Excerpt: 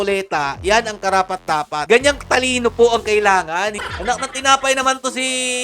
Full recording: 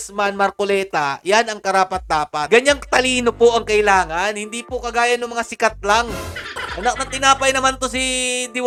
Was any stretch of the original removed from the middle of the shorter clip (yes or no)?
yes